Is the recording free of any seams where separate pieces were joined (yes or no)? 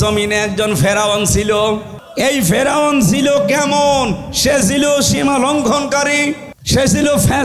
no